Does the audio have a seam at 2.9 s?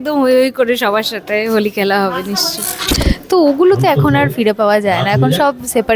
yes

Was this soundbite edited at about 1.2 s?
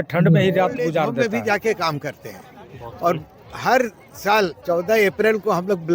yes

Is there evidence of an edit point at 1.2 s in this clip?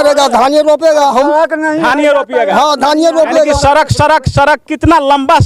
no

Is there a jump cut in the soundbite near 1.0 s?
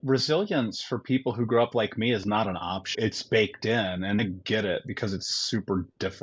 no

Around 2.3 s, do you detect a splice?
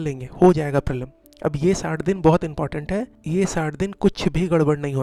no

